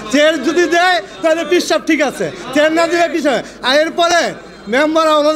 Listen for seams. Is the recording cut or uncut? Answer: uncut